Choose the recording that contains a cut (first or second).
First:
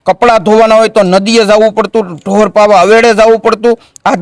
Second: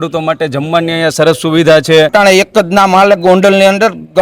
second